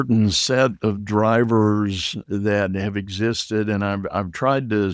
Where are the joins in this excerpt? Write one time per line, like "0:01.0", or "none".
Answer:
none